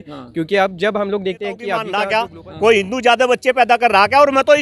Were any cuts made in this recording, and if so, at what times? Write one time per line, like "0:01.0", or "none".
0:01.9